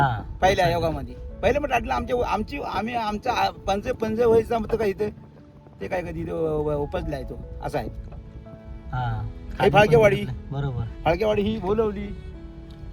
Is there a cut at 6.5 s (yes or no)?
no